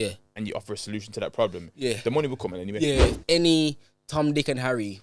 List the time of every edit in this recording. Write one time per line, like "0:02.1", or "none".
0:03.1